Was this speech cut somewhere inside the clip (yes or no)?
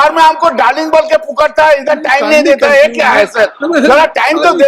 no